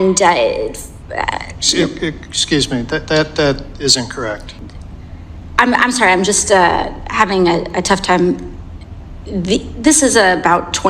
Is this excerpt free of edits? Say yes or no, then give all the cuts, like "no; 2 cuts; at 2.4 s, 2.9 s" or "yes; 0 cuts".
no; 1 cut; at 4.5 s